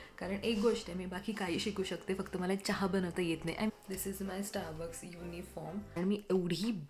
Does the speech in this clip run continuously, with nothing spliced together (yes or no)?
no